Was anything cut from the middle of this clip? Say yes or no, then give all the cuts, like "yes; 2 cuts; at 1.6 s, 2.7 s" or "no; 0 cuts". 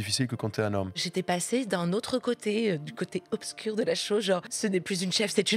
yes; 2 cuts; at 1.0 s, 4.5 s